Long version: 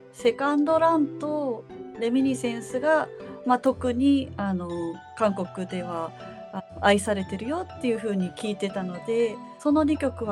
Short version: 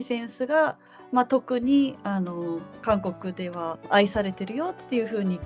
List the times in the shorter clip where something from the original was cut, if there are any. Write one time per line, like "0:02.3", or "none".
0:03.8